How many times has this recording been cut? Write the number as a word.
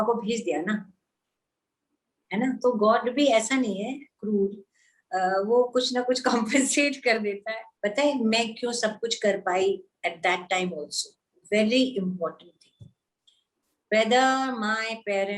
one